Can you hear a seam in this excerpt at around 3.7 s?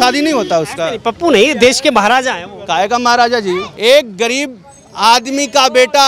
yes; 1 cut; at 3.7 s

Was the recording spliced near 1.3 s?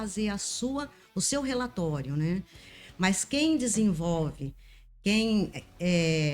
no; 1 cut; at 2.7 s

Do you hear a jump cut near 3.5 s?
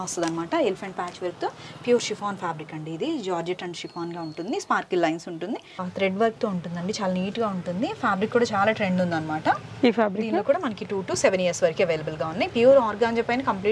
no; 1 cut; at 5.7 s

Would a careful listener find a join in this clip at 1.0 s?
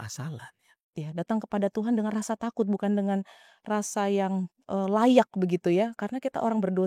yes; 1 cut; at 1.0 s

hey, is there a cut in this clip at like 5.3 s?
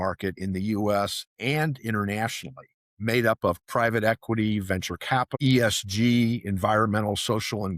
yes; 1 cut; at 5.3 s

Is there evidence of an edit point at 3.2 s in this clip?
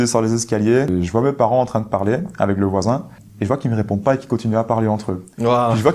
yes; 2 cuts; at 0.9 s, 3.2 s

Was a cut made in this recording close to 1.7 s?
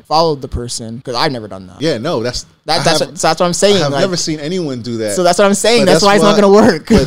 yes; 2 cuts; at 1.0 s, 1.7 s

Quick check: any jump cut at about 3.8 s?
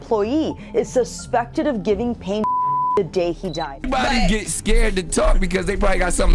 yes; 1 cut; at 3.8 s

